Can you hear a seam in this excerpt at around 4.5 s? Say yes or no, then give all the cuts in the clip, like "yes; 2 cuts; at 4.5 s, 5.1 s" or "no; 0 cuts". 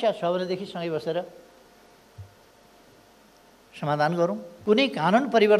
yes; 1 cut; at 4.5 s